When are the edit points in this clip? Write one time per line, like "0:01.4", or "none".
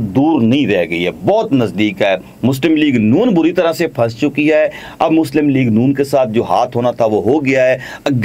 none